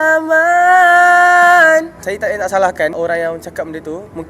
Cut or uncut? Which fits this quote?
cut